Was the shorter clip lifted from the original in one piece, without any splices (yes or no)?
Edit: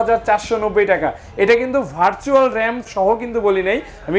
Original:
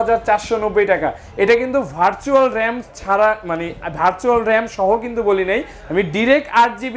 no